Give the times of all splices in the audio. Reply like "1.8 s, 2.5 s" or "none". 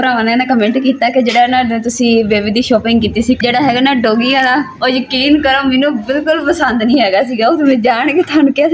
3.4 s